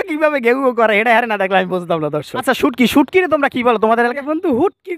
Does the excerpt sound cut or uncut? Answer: cut